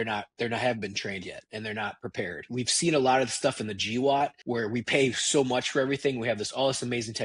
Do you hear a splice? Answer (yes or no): yes